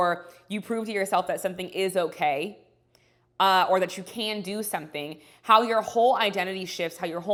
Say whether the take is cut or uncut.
uncut